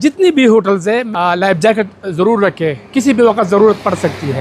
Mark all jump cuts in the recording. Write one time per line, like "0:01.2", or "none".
0:01.1

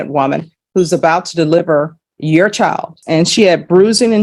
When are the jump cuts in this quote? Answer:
0:03.0

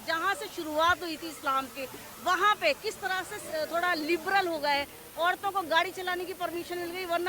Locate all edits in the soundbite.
none

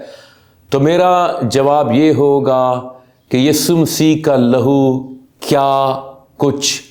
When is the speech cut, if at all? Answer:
none

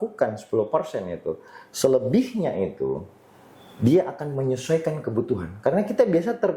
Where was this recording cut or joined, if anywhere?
none

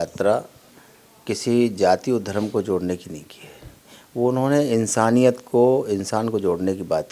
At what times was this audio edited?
none

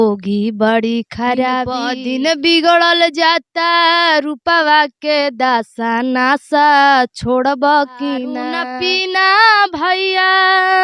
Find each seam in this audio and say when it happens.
0:01.9
0:08.5

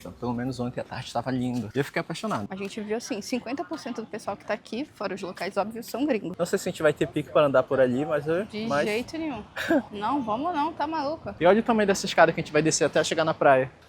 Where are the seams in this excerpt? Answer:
0:02.5
0:06.3
0:11.3

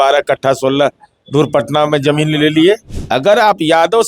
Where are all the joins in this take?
0:02.9

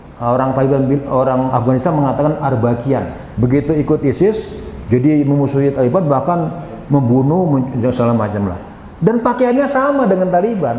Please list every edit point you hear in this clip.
0:03.2

